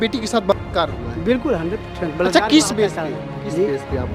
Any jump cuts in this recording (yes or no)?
no